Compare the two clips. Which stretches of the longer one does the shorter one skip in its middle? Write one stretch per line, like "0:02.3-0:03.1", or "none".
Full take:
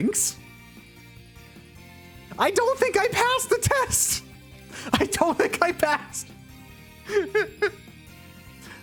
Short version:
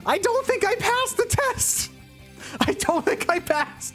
none